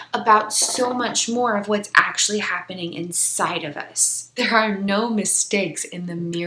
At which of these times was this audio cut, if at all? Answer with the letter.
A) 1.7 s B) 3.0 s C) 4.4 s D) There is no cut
C